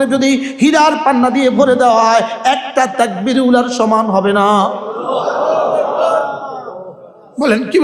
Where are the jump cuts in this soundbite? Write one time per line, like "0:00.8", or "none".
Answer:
none